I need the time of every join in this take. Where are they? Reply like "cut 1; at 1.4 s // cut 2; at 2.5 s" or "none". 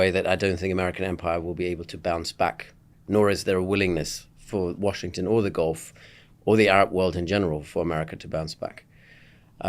none